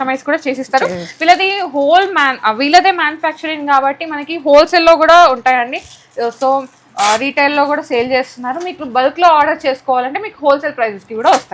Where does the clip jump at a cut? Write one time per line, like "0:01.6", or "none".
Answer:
none